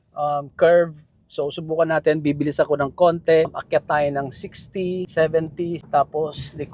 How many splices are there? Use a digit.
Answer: 3